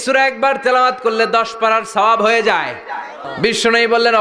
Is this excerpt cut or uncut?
cut